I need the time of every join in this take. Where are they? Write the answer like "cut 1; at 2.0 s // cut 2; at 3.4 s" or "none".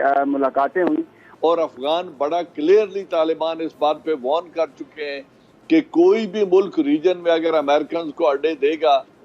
cut 1; at 1.2 s

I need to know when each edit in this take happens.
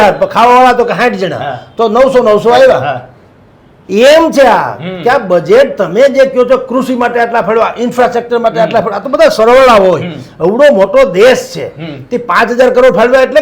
none

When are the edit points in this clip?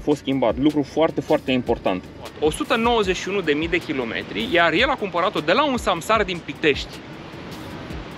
cut 1; at 2.3 s

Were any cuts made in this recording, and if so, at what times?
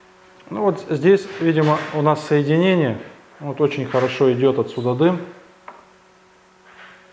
none

